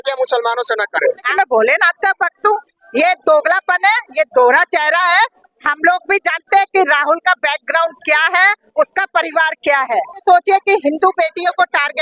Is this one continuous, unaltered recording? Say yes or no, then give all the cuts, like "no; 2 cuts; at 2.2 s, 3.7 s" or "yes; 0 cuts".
no; 2 cuts; at 1.3 s, 10.2 s